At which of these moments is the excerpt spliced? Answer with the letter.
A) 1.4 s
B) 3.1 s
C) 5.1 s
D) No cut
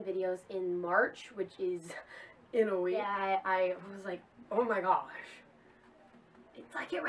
B